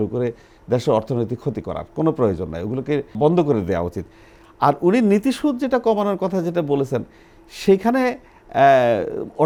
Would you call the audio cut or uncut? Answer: uncut